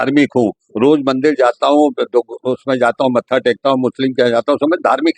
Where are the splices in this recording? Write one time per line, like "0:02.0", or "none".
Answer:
none